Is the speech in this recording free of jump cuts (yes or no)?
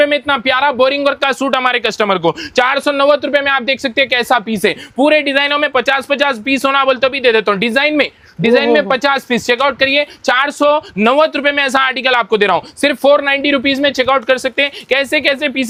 yes